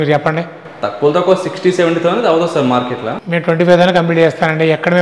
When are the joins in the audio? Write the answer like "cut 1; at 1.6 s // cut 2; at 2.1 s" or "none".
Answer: cut 1; at 3.2 s